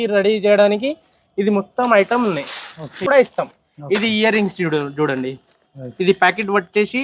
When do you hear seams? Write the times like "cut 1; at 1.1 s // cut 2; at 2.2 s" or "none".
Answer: cut 1; at 3.1 s